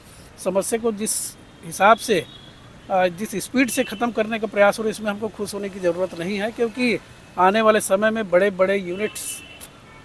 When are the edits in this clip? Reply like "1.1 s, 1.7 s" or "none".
none

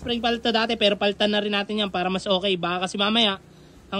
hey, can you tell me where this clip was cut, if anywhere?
none

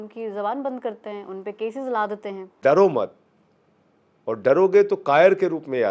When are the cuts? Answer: 2.6 s

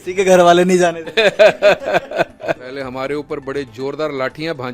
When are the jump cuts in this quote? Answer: 2.6 s

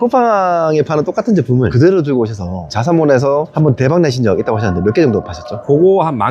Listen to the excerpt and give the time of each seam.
none

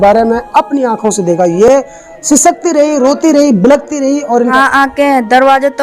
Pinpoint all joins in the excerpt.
none

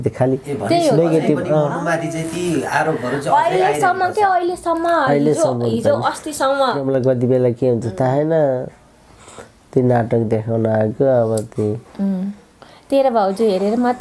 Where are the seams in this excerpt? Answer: 6.8 s

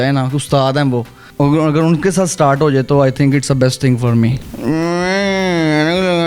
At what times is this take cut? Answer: 1.2 s, 4.4 s

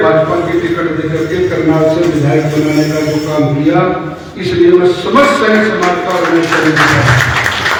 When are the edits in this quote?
none

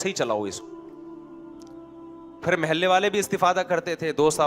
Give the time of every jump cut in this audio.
none

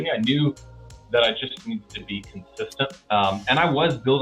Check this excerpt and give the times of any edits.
3.0 s

